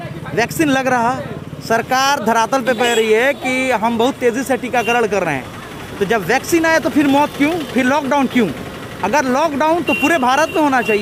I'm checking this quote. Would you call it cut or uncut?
uncut